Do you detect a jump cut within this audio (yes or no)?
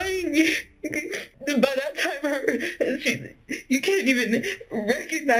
no